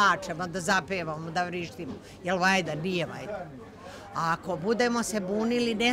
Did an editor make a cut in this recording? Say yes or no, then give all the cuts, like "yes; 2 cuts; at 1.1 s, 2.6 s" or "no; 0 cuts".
no; 0 cuts